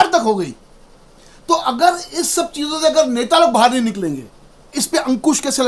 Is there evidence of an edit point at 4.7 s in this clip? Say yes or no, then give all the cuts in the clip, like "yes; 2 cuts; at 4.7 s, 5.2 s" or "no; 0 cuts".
yes; 1 cut; at 4.7 s